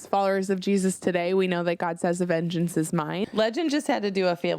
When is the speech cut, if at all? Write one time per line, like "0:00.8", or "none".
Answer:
0:03.2